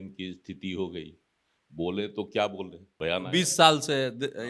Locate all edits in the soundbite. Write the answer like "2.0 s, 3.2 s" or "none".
2.9 s